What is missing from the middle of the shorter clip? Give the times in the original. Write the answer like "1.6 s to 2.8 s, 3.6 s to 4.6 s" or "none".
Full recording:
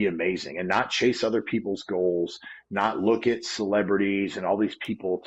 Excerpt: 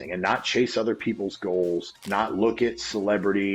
2.4 s to 2.6 s